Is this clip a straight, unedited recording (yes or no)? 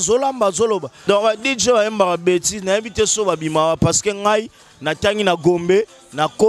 no